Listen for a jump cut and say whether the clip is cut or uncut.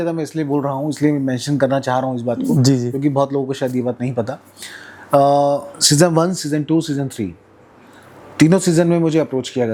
uncut